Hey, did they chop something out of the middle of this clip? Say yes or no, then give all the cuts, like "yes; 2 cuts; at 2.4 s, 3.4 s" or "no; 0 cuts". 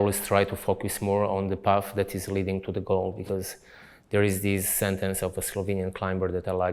no; 0 cuts